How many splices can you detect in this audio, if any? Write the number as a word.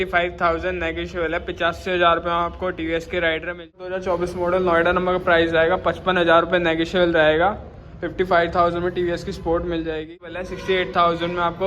two